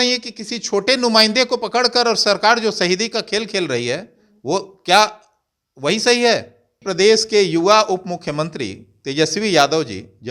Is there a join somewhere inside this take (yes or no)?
yes